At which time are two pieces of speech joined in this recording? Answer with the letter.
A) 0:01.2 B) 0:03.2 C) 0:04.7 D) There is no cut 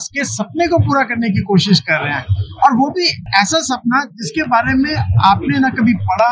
B